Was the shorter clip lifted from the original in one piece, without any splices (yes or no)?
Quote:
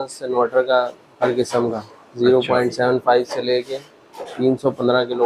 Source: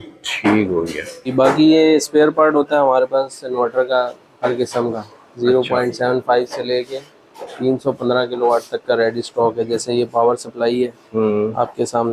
yes